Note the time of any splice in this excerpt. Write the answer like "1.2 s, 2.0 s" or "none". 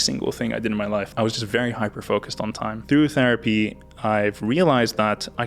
1.1 s, 2.8 s